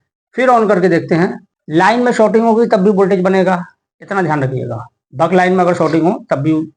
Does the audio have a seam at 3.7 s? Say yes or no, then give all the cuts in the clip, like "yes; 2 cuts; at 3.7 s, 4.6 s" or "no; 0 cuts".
no; 1 cut; at 1.4 s